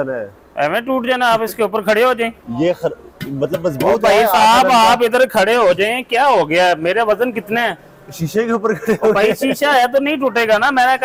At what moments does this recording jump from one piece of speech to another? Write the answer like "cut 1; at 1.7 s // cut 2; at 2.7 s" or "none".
none